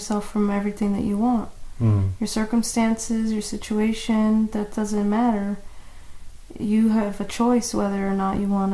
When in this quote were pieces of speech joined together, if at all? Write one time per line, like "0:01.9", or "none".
none